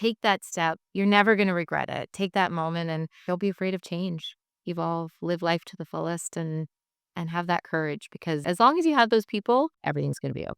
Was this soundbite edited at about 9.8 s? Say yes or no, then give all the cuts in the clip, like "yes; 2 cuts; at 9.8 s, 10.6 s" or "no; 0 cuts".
yes; 5 cuts; at 0.8 s, 2.1 s, 3.1 s, 8.4 s, 9.8 s